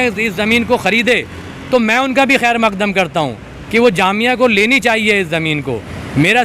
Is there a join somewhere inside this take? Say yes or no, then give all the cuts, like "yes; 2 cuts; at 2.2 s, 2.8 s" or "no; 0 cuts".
no; 0 cuts